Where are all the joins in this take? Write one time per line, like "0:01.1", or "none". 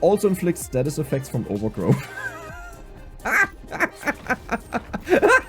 none

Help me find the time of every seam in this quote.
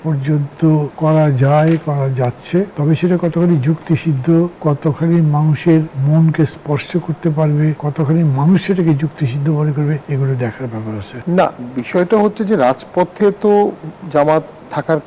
0:00.9
0:02.7
0:04.6
0:05.9
0:07.8
0:10.0
0:11.1

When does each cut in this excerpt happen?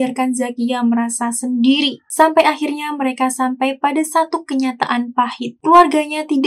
0:02.1

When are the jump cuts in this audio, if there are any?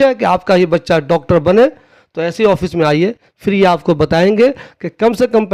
none

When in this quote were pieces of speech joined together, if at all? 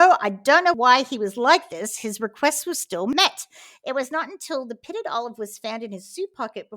0:00.8
0:02.9

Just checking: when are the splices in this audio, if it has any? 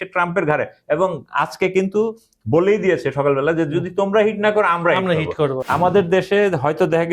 0:05.6

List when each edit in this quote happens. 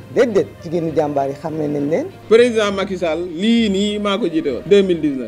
0:02.1

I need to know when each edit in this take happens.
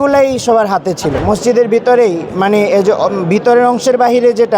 0:01.2

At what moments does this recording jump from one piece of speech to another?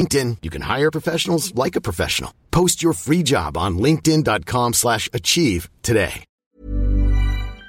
0:06.3

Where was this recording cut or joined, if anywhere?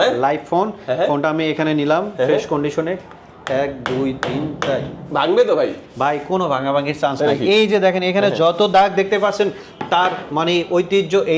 none

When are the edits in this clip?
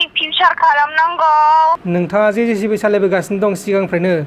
0:01.8

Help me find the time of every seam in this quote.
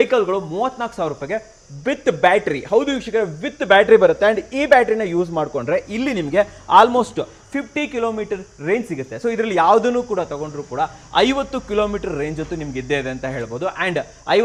none

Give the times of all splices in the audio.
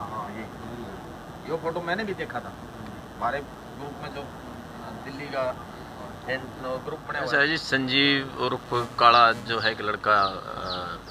0:07.3

